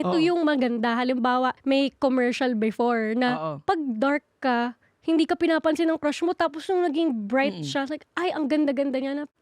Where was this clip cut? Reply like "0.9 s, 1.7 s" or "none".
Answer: 1.6 s